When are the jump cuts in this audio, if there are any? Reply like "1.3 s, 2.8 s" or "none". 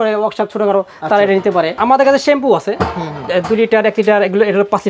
1.7 s

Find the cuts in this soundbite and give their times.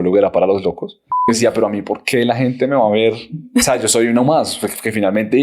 1.3 s

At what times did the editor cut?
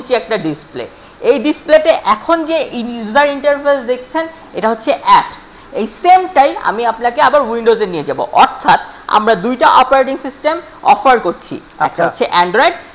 none

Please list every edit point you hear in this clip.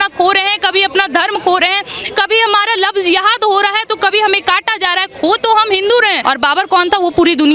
6.2 s

